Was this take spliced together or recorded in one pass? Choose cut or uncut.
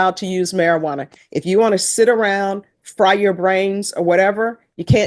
uncut